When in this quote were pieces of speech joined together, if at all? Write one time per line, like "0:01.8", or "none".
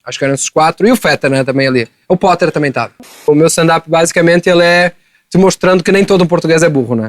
0:03.3